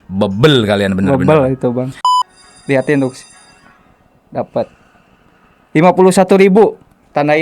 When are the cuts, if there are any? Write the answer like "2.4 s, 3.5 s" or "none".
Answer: 1.9 s